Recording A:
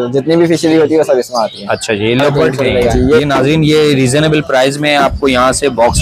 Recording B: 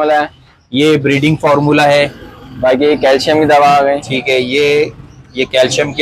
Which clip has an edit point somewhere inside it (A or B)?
A